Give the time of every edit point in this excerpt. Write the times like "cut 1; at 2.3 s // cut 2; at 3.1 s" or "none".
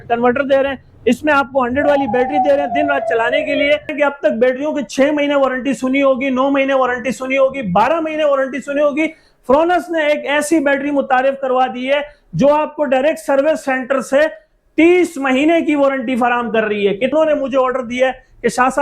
cut 1; at 3.9 s // cut 2; at 17.1 s